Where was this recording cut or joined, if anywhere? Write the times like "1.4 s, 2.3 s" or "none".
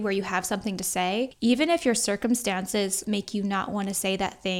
1.3 s, 3.0 s